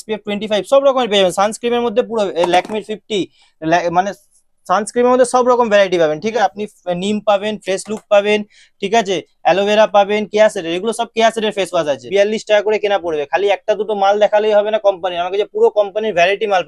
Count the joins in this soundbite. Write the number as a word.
two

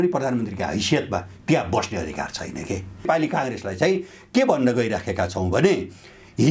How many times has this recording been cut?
one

